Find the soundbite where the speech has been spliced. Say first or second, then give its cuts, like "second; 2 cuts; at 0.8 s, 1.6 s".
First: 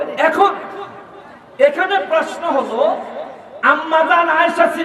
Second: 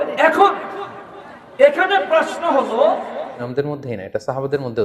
second; 1 cut; at 3.4 s